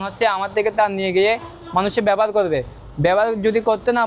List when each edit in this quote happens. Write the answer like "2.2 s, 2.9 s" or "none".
none